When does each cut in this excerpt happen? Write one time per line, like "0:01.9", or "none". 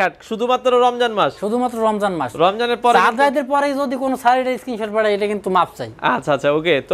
none